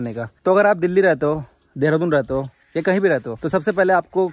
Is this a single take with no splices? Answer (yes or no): yes